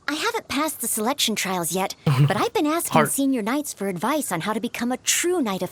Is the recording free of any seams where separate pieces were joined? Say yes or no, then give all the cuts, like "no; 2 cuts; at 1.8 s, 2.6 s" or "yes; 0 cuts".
yes; 0 cuts